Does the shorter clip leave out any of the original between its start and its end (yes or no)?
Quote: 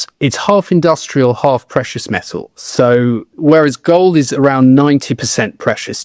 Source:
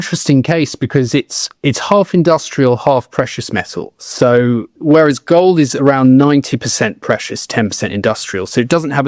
no